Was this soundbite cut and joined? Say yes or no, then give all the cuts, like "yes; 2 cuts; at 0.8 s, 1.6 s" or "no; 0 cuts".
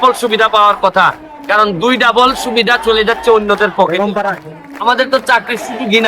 yes; 1 cut; at 4.5 s